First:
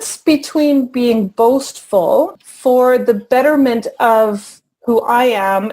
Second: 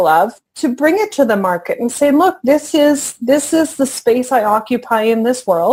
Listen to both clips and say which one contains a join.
first; 1 cut; at 2.3 s

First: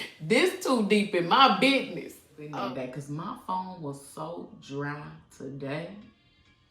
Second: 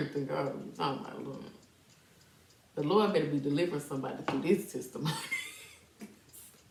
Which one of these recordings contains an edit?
first; 1 cut; at 2.5 s

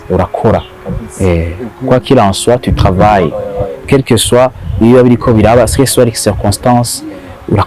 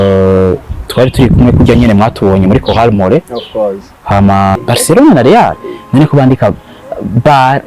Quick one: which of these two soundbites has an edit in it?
second; 1 cut; at 4.6 s

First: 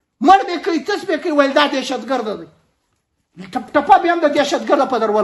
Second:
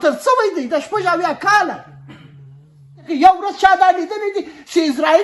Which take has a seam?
second; 1 cut; at 3.0 s

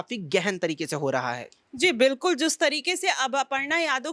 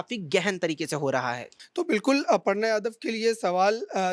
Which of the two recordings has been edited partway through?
second; 1 cut; at 1.6 s

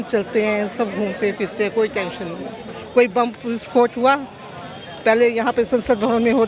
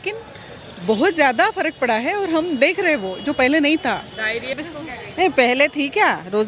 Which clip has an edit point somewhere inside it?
second; 1 cut; at 4.6 s

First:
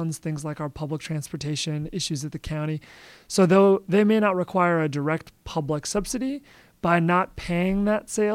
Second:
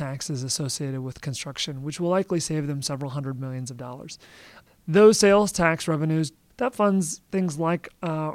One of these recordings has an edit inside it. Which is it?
second; 2 cuts; at 4.5 s, 6.4 s

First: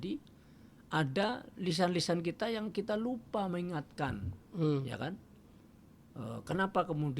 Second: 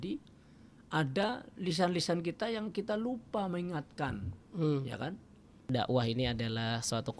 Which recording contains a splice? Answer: second; 1 cut; at 5.6 s

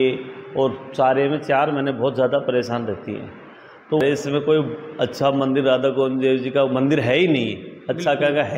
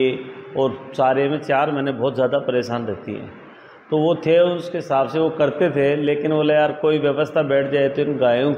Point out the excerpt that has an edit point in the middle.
first; 1 cut; at 4.0 s

